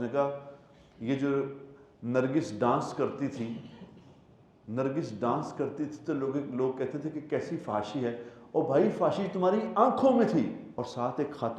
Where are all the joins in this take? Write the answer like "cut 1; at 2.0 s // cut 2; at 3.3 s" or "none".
cut 1; at 10.7 s